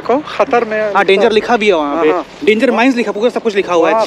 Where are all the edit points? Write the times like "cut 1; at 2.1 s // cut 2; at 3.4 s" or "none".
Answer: none